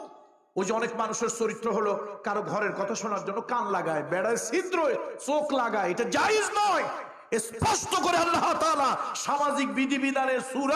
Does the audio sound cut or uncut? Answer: uncut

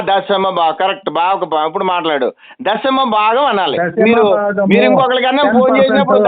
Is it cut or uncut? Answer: uncut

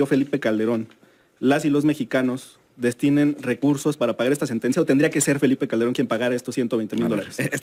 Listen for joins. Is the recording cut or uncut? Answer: uncut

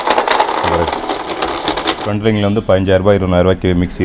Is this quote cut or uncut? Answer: cut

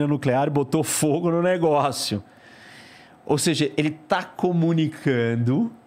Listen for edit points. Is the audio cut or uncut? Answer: uncut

